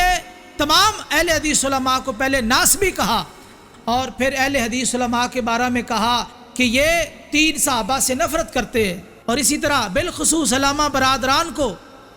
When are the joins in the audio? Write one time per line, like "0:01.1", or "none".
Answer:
0:09.1